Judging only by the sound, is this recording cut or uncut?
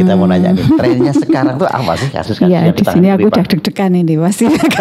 uncut